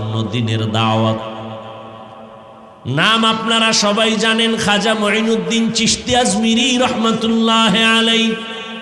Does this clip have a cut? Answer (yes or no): no